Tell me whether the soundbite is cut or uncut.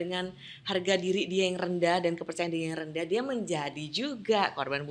uncut